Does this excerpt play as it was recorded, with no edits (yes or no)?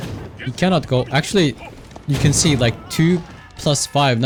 yes